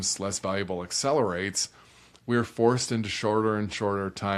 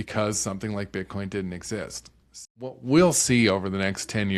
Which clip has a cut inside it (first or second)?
second